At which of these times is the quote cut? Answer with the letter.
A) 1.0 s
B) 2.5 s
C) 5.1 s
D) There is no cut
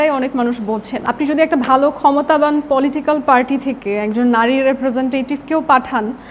A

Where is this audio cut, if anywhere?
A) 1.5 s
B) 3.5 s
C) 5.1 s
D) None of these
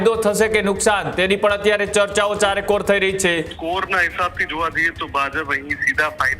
B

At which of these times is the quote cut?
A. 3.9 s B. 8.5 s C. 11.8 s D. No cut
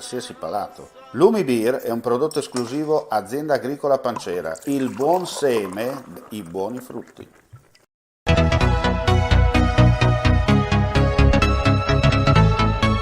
B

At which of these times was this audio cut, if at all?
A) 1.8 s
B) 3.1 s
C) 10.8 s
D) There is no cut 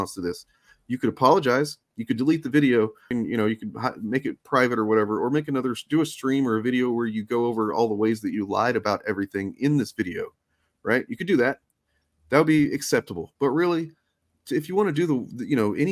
B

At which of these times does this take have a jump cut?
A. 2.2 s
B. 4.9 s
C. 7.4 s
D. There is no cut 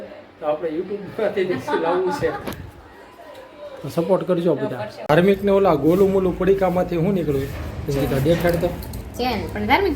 B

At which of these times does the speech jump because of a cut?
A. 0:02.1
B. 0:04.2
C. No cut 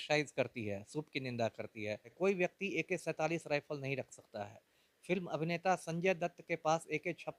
A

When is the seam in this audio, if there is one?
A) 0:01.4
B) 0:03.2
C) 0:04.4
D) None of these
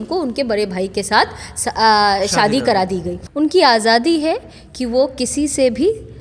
B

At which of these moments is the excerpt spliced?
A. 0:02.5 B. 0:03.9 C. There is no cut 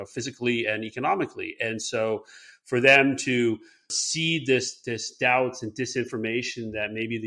B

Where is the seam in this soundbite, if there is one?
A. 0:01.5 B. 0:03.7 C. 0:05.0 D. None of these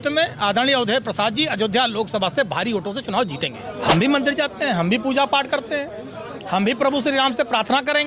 B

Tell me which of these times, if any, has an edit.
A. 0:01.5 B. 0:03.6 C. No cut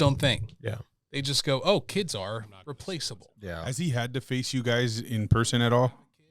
B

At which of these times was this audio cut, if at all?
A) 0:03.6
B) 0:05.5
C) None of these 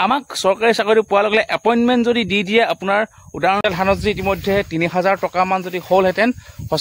A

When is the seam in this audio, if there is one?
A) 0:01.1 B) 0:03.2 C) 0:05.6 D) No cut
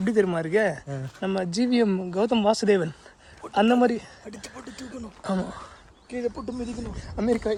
D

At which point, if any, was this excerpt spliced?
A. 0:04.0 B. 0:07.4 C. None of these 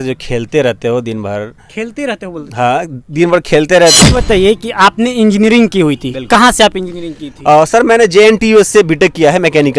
A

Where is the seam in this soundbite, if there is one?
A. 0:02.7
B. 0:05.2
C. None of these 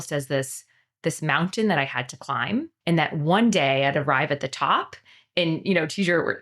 A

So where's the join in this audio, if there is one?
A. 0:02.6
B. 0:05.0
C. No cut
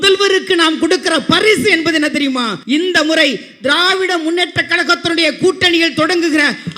A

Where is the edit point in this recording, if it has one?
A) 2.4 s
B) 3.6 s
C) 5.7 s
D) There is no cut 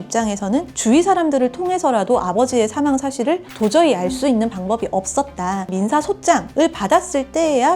C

